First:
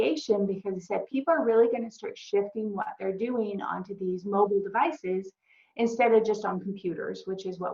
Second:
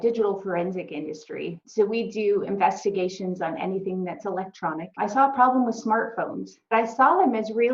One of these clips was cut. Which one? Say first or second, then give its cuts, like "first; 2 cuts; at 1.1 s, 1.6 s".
second; 3 cuts; at 1.6 s, 4.9 s, 6.7 s